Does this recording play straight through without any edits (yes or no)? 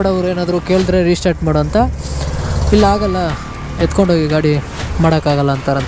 yes